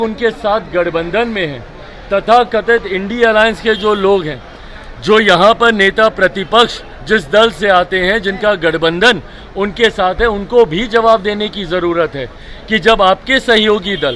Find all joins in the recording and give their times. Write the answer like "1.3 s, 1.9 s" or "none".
none